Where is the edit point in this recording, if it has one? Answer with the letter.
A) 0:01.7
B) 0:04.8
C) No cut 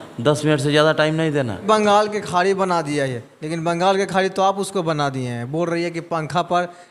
A